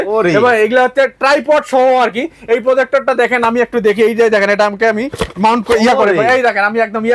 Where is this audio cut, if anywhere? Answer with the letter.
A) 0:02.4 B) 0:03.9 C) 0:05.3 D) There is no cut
D